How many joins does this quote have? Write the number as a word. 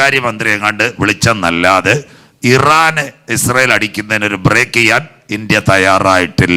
zero